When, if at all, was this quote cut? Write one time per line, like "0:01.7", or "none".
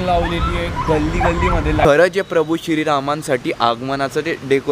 0:01.8

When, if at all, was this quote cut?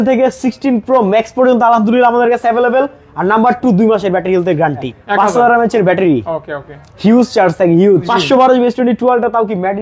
0:04.9
0:08.1

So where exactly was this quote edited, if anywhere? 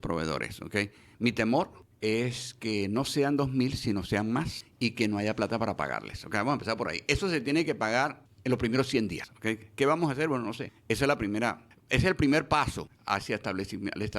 0:01.8
0:04.6
0:08.3
0:09.3
0:10.7
0:11.7
0:12.9

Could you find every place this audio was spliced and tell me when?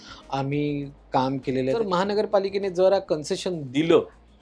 0:01.8

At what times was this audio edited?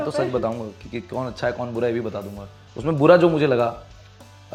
none

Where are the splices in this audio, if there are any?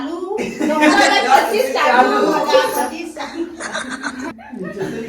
0:01.2

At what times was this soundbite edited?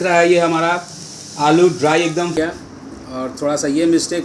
0:02.4

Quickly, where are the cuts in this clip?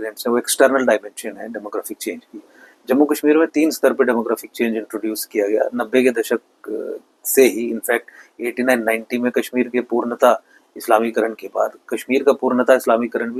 none

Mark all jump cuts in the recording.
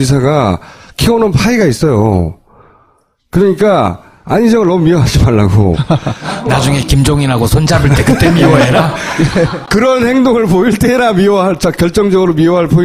none

